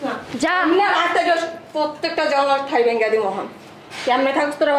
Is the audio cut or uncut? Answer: uncut